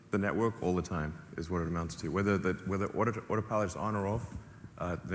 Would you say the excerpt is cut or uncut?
uncut